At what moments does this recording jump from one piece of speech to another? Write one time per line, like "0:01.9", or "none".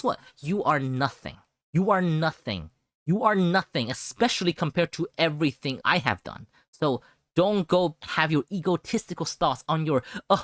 0:05.8
0:08.0